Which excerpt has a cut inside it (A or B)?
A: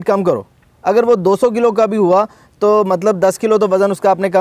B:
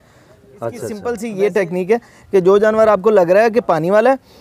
B